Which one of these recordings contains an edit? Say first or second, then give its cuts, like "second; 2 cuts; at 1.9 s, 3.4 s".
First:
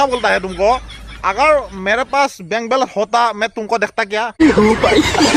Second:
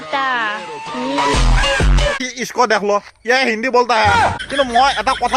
second; 2 cuts; at 2.2 s, 4.4 s